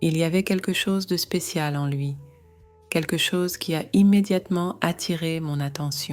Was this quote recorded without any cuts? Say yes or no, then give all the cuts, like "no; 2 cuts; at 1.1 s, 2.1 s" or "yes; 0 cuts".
yes; 0 cuts